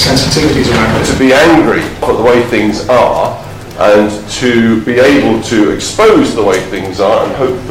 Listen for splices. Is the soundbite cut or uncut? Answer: cut